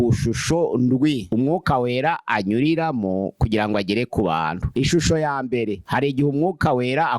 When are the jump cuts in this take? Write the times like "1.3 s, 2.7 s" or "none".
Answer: 1.2 s, 4.6 s